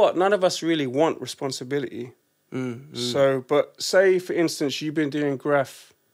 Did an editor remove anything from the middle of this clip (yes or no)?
no